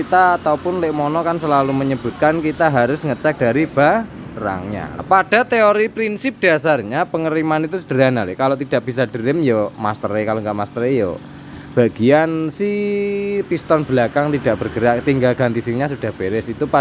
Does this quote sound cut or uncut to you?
cut